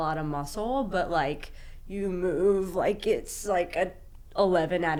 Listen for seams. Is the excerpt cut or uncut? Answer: uncut